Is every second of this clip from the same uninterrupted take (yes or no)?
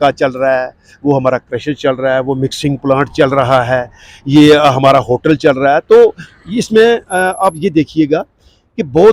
yes